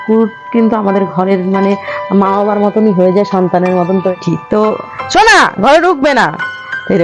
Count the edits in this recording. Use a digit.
1